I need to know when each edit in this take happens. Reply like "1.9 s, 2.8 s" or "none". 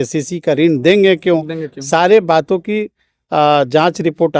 none

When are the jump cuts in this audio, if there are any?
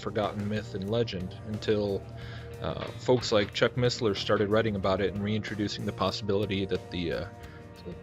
6.8 s

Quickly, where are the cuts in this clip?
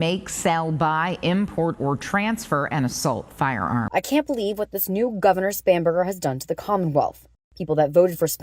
3.9 s

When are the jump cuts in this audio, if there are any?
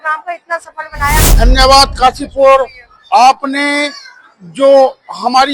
1.3 s

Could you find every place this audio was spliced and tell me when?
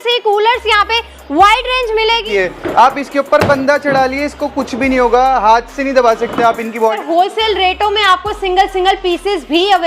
2.2 s, 7.0 s

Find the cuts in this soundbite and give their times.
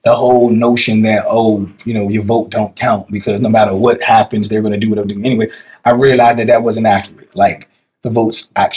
none

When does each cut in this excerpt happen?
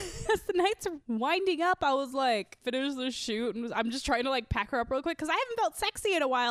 0.9 s, 2.6 s

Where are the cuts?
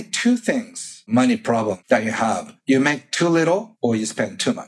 1.0 s, 2.1 s, 3.7 s

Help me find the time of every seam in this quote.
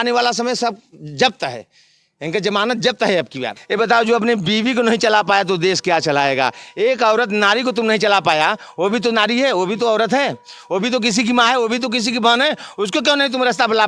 3.5 s

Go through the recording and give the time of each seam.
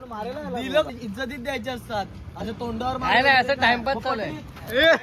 0.9 s

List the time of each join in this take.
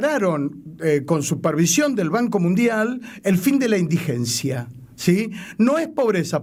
none

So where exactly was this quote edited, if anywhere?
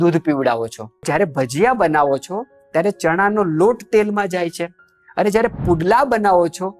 1.0 s

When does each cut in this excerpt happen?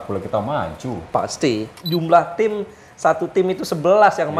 1.7 s

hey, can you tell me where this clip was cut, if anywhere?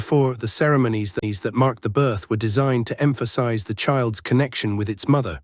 4.1 s

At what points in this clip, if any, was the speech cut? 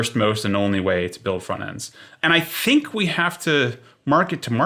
none

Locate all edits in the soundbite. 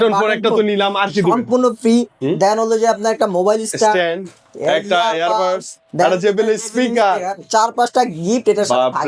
none

